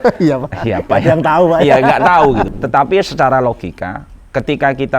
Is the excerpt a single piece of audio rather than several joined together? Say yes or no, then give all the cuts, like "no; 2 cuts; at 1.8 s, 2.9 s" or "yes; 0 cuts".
no; 1 cut; at 2.5 s